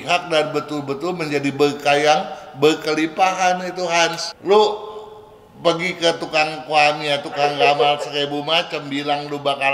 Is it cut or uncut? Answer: cut